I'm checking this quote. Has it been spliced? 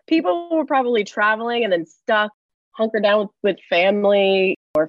no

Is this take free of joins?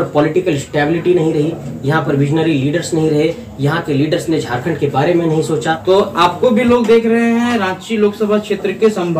no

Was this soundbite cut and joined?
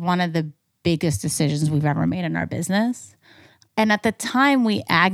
no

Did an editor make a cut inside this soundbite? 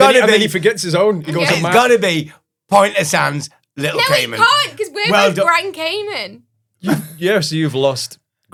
no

